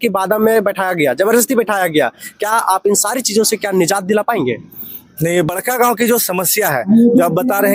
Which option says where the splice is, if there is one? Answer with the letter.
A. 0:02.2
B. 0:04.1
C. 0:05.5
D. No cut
C